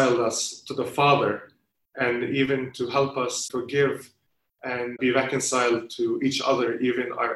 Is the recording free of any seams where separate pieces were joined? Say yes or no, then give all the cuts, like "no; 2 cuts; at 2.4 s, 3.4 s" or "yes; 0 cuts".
no; 2 cuts; at 3.4 s, 5.0 s